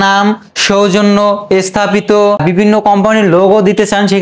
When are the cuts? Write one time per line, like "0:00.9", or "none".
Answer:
0:02.4